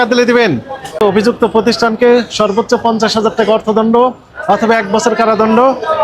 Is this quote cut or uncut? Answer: cut